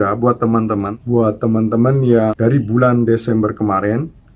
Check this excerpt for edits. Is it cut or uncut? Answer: cut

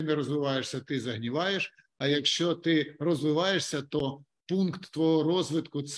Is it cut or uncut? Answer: uncut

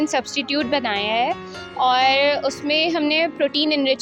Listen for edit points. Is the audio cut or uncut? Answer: uncut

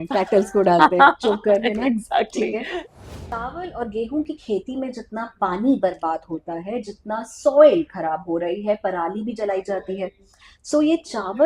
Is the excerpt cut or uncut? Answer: cut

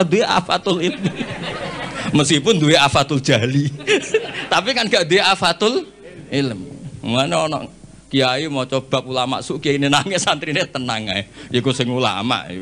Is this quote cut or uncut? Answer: uncut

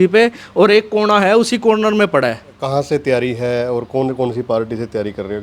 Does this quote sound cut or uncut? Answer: cut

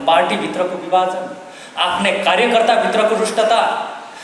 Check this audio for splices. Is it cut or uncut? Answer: uncut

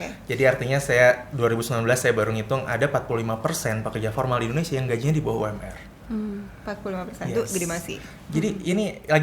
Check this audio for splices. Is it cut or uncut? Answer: uncut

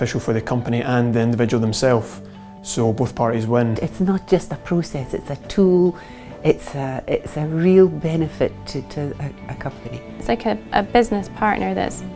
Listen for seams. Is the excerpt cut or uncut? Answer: cut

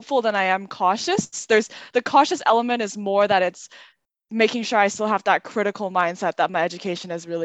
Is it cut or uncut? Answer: uncut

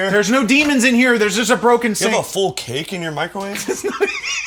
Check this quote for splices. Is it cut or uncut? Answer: uncut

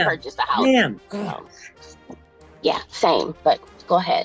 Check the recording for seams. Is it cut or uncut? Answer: cut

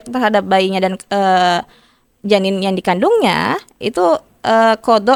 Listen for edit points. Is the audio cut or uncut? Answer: uncut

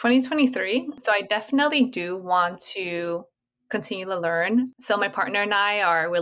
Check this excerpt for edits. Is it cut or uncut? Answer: cut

